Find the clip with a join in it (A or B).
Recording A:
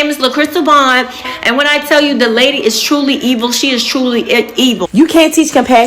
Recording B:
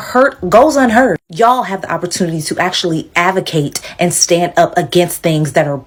A